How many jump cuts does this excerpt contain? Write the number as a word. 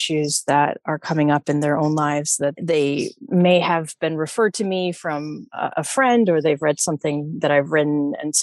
zero